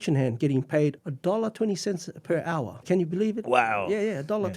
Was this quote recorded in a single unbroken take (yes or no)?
no